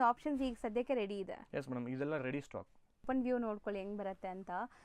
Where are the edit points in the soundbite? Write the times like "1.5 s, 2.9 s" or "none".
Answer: 3.0 s